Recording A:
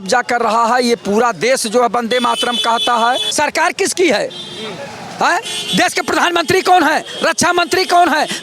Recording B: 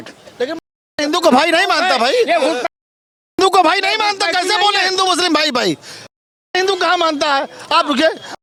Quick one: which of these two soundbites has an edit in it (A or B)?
A